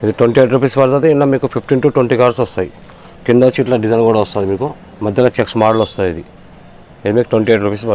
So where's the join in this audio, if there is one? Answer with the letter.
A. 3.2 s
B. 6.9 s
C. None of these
C